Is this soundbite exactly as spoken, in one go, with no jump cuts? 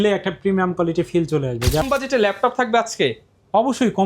no; 1 cut; at 1.8 s

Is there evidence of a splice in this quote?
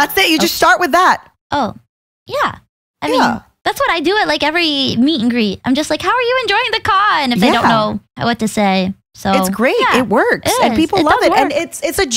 yes; 3 cuts; at 1.3 s, 3.5 s, 8.1 s

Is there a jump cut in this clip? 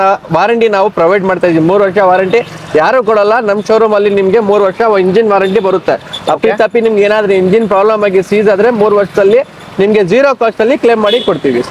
no; 0 cuts

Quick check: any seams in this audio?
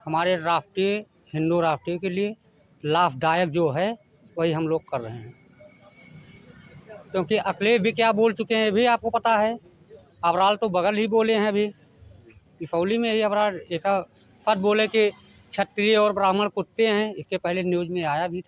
no; 0 cuts

